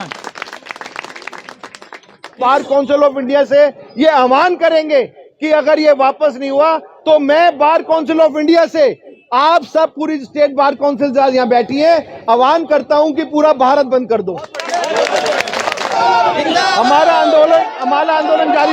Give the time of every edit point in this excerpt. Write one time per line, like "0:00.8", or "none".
0:02.4
0:15.9